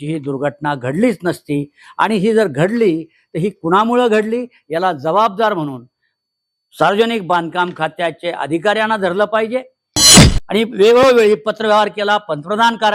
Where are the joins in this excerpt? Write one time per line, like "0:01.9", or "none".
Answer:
0:10.0